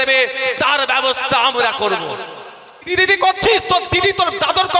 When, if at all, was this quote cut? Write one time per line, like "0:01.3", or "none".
0:02.9